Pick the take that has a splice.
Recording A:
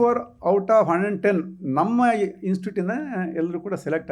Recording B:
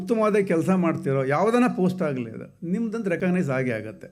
B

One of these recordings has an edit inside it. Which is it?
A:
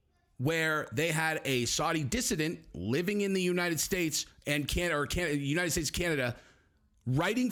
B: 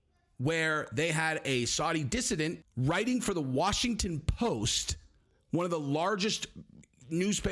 B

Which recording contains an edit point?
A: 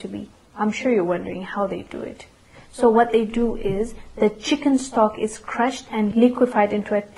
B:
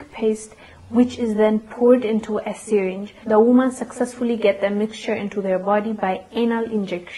A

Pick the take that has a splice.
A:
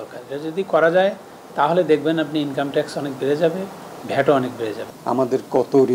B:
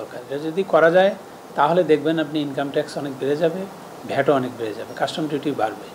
A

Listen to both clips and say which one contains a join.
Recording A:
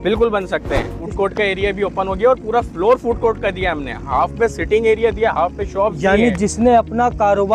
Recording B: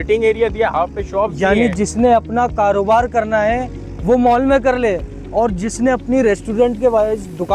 A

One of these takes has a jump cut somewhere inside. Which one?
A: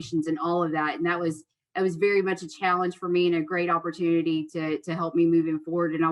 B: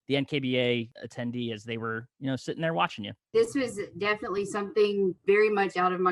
B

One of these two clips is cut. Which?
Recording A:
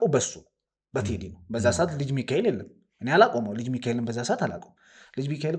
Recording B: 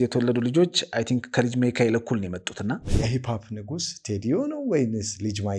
B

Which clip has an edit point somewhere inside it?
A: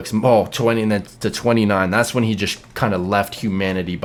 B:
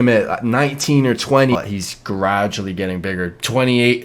B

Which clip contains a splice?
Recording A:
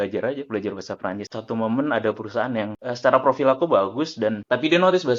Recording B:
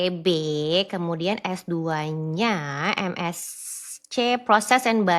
A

